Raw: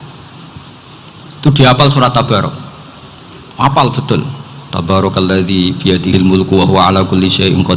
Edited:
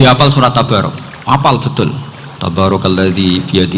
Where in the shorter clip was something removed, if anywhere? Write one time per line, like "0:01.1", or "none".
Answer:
0:01.1